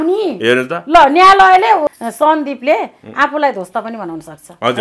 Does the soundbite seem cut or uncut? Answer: cut